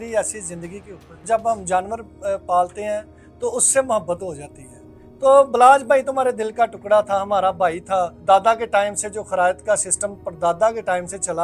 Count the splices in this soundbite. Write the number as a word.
two